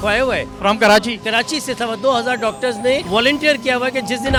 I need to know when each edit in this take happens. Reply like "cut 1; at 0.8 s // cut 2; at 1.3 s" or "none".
none